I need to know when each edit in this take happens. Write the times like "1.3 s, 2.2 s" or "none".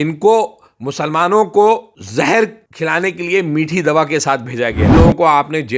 2.0 s, 2.6 s, 5.0 s